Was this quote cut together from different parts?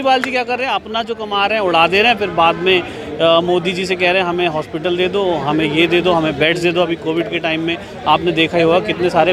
no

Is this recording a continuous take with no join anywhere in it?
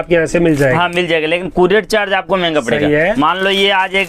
yes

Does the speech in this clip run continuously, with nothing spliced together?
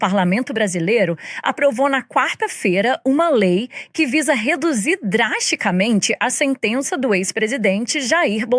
yes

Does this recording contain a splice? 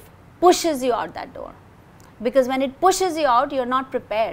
no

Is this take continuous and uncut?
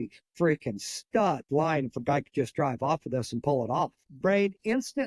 no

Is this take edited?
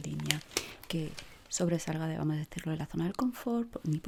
no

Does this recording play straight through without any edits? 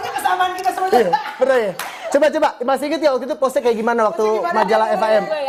yes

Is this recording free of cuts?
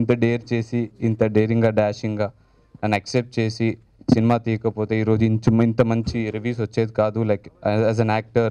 yes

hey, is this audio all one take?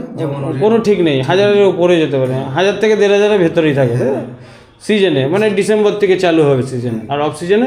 yes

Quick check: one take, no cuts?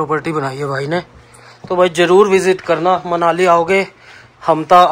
yes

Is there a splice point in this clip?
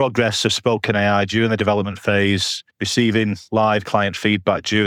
no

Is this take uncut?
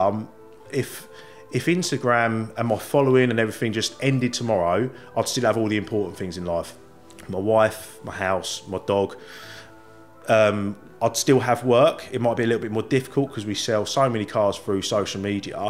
yes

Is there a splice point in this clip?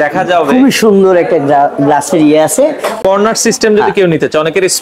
yes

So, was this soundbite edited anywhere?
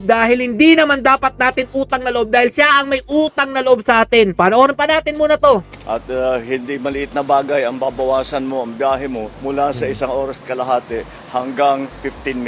no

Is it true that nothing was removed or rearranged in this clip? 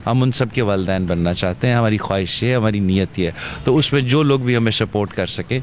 yes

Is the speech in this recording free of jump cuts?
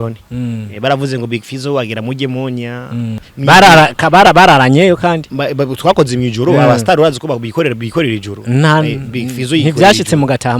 no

